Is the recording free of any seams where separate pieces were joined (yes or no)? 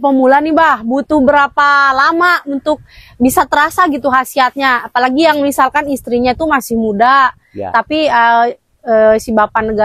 yes